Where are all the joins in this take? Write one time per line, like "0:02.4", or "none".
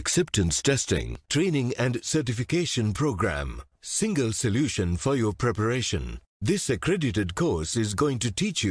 0:01.2